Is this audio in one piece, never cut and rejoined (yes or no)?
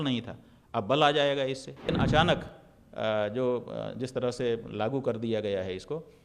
no